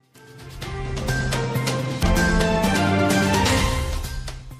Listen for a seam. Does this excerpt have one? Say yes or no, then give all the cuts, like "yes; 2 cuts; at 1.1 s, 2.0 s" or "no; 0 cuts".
yes; 1 cut; at 2.0 s